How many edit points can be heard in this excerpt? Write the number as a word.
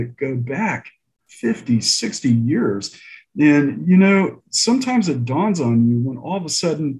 zero